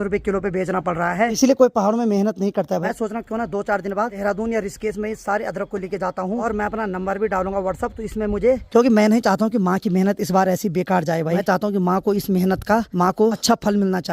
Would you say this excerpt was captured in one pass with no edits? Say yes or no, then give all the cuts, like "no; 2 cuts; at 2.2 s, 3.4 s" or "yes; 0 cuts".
no; 7 cuts; at 1.4 s, 2.8 s, 4.2 s, 6.4 s, 8.6 s, 11.4 s, 13.1 s